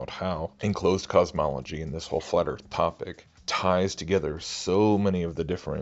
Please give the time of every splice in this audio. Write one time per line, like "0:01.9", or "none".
none